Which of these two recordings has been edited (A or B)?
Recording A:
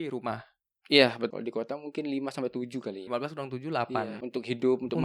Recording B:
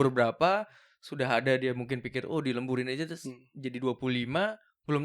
A